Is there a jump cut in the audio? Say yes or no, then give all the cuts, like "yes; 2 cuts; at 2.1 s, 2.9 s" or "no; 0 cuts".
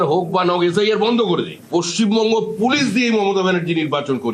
yes; 1 cut; at 1.6 s